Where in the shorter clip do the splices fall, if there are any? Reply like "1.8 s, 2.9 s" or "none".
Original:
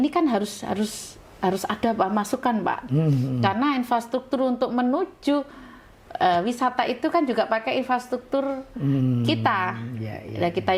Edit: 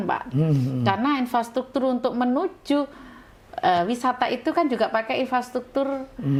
none